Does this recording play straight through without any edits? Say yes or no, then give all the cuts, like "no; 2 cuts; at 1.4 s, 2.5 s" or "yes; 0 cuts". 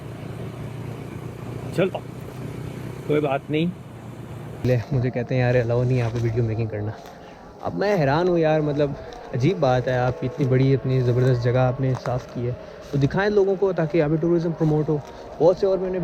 no; 1 cut; at 4.7 s